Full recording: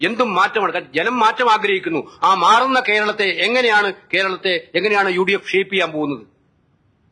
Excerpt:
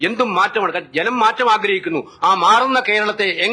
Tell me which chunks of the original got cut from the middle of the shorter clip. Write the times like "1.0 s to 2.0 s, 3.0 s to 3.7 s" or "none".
none